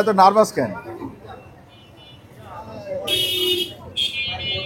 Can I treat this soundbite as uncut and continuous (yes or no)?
yes